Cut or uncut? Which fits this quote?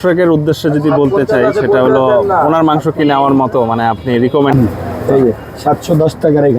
cut